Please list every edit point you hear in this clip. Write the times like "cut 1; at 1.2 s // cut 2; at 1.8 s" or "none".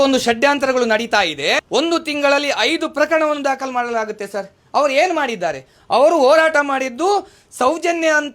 cut 1; at 1.6 s

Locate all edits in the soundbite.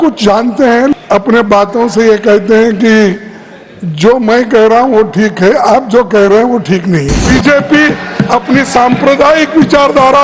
cut 1; at 0.9 s // cut 2; at 7.2 s

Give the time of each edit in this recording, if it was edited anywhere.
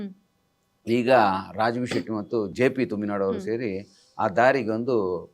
cut 1; at 2.5 s

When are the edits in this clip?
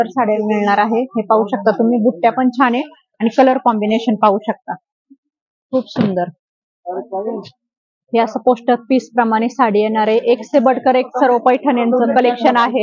none

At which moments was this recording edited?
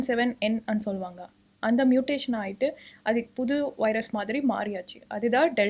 none

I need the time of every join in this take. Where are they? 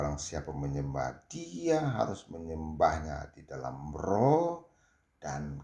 none

